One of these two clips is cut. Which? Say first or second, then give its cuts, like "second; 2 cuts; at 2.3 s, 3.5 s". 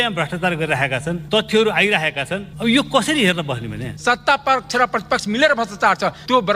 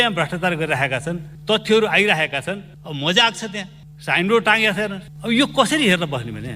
first; 3 cuts; at 1.2 s, 2.5 s, 3.8 s